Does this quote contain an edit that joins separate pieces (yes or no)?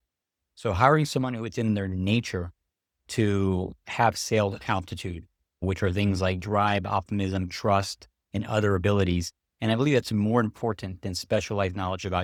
no